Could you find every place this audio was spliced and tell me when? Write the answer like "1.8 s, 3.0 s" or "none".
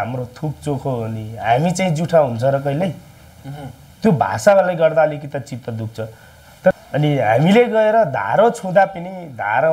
6.7 s